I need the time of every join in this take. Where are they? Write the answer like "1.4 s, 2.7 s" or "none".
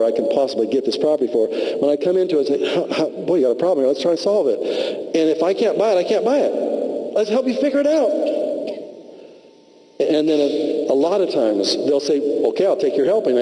8.2 s